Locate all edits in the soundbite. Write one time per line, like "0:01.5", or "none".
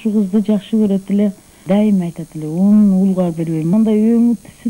0:03.7